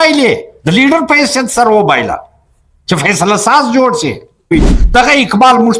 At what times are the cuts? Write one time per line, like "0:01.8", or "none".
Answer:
0:04.5